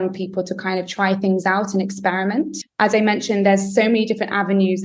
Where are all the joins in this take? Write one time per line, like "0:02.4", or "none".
0:02.6